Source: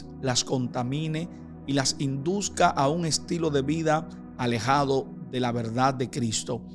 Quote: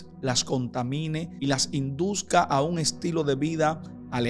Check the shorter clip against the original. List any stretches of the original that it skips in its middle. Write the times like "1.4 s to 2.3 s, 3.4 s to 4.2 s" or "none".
1.3 s to 1.6 s